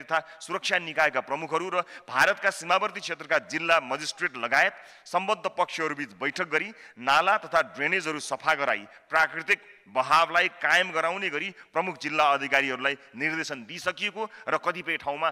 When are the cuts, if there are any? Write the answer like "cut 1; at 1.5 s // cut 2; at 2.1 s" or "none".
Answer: none